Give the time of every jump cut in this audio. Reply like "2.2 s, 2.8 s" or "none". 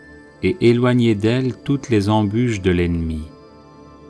none